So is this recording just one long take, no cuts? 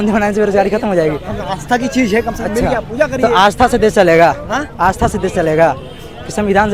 yes; 0 cuts

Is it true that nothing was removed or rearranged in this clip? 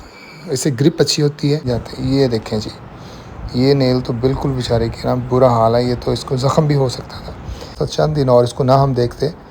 no; 2 cuts; at 1.7 s, 7.8 s

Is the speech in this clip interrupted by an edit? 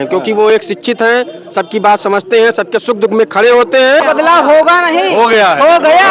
yes; 1 cut; at 4.0 s

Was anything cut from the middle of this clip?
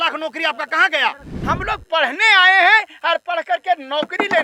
yes; 1 cut; at 1.3 s

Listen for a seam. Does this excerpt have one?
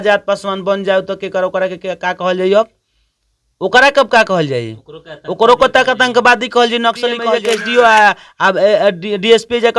yes; 1 cut; at 7.3 s

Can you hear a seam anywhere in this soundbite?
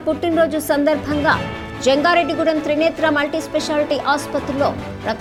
no; 0 cuts

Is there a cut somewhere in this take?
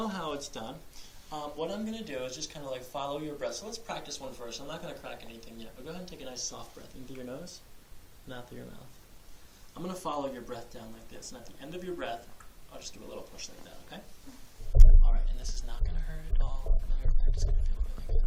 yes; 1 cut; at 8.8 s

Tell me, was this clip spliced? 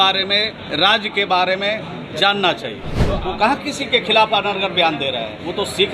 yes; 1 cut; at 3.2 s

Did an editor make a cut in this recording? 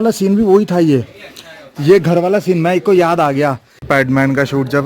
yes; 1 cut; at 3.7 s

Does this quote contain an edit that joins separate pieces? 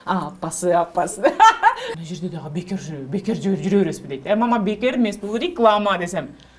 yes; 1 cut; at 1.9 s

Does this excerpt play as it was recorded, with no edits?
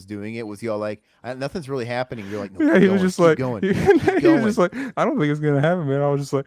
yes; 0 cuts

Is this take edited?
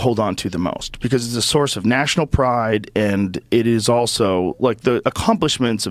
no; 0 cuts

